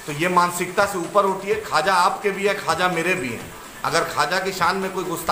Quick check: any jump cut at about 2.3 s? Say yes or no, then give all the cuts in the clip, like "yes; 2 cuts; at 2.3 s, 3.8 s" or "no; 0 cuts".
no; 0 cuts